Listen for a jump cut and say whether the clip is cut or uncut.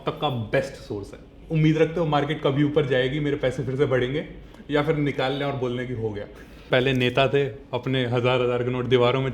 cut